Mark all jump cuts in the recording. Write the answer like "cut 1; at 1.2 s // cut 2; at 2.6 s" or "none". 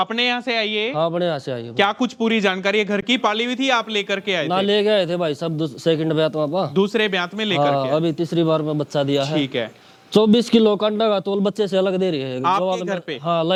none